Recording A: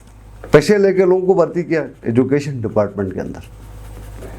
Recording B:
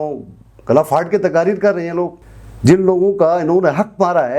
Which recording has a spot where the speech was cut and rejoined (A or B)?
B